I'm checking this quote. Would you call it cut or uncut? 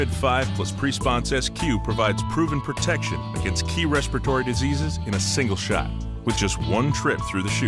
uncut